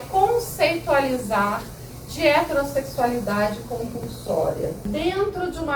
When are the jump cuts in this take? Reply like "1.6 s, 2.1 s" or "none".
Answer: 4.8 s

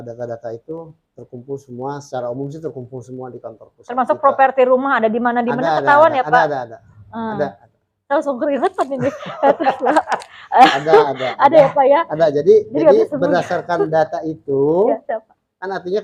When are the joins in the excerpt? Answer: none

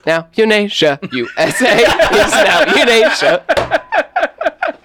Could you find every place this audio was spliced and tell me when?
none

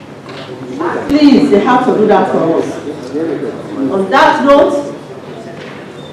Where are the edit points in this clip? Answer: 1.1 s

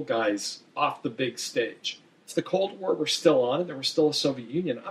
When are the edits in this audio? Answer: 2.3 s

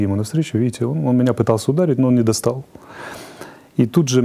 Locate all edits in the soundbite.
none

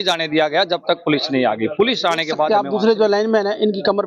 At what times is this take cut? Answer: 2.5 s

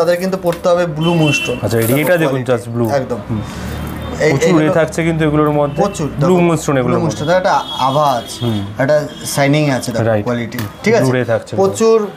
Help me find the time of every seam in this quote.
none

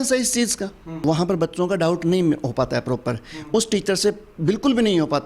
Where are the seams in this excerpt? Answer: 1.0 s

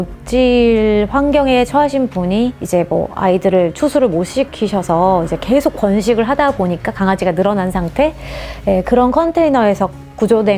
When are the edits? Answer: none

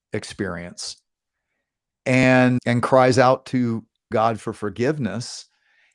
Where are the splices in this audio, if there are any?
2.6 s, 4.0 s

